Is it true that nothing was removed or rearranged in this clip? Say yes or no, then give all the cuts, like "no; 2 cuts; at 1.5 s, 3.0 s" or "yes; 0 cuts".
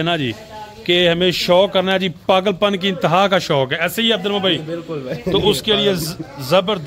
yes; 0 cuts